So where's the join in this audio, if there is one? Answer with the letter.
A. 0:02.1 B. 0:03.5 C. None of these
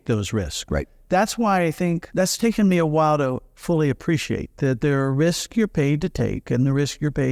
A